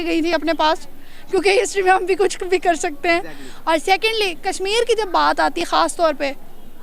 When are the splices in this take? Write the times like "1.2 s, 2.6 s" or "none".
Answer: none